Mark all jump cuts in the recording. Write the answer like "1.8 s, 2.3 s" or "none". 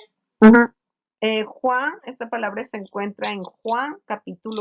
2.0 s